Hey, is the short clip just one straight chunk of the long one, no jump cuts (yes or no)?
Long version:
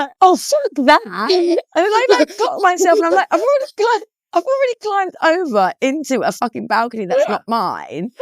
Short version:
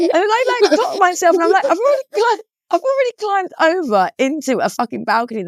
yes